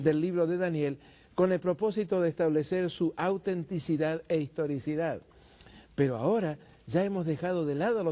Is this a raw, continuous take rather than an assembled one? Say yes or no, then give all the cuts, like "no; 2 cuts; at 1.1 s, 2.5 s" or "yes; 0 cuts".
yes; 0 cuts